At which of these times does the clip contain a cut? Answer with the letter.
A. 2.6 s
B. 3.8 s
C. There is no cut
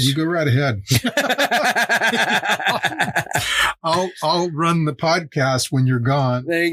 C